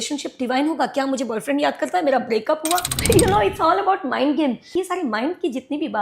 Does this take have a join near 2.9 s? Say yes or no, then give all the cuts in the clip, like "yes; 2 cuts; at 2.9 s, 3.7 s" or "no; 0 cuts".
yes; 2 cuts; at 2.9 s, 4.7 s